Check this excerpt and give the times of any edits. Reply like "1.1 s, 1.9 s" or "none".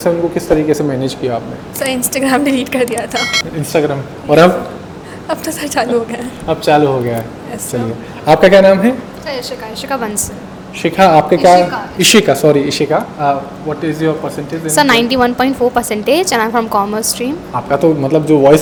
none